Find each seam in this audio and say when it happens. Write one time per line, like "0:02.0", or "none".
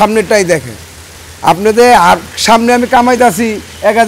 none